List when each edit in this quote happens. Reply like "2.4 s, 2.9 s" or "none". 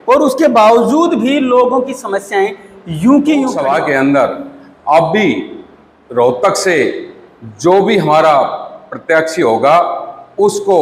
3.5 s